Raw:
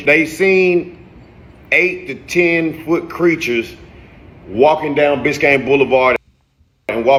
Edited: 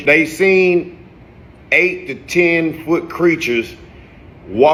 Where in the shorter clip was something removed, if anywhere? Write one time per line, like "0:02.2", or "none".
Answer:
none

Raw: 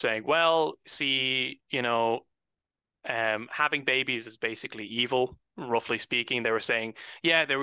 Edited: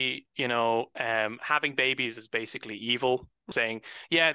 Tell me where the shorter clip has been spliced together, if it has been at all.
0:00.9
0:03.5

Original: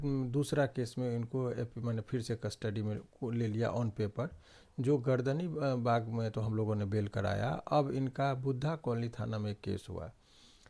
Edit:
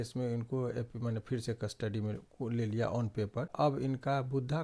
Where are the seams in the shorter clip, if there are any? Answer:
0:03.5

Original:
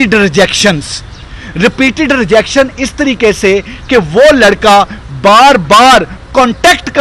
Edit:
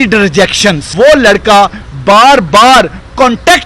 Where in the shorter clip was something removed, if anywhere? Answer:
0:00.9

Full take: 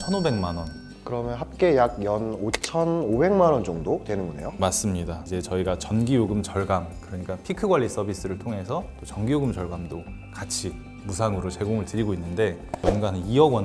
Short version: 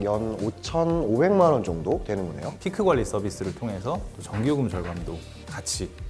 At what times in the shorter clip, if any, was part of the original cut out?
0:02.5

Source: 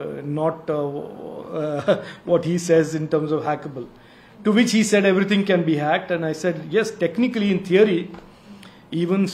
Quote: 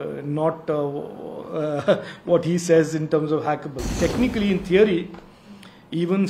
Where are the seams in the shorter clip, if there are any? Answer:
0:03.9

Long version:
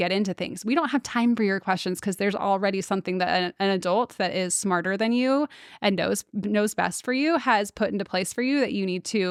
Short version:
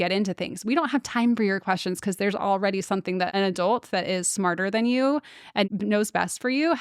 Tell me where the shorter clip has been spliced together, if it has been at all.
0:03.3
0:05.7

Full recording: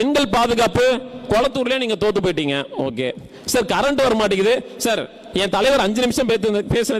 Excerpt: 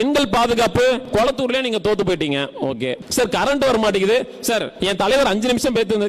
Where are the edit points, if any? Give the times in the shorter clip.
0:01.0
0:03.0
0:04.7

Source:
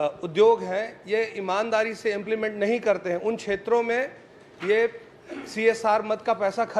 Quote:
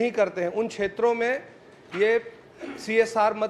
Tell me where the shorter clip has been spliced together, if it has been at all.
none

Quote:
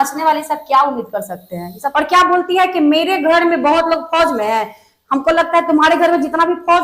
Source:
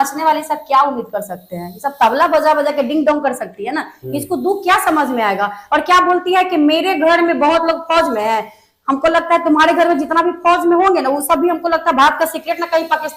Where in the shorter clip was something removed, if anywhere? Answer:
0:01.8

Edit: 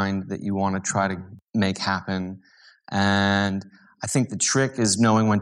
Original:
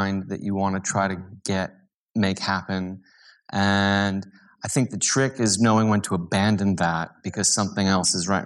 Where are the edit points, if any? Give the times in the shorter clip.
0:01.3

